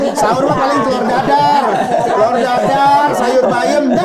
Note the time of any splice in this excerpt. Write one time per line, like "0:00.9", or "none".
none